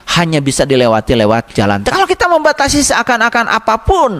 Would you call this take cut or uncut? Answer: cut